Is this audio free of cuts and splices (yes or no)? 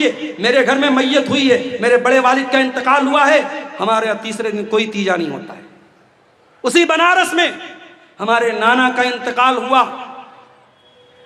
yes